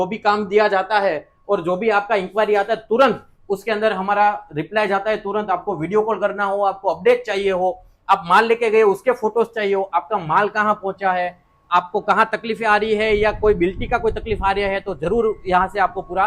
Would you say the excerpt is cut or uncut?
uncut